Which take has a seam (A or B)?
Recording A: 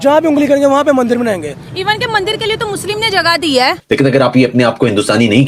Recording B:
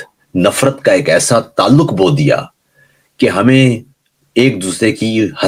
A